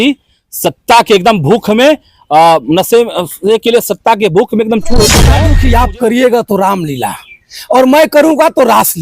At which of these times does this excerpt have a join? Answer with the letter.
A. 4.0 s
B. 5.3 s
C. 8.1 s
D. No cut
B